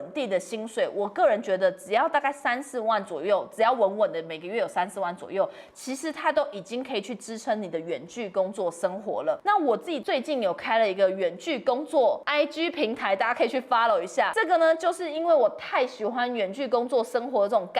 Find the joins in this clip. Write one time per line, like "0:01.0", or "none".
0:09.7
0:12.2
0:14.3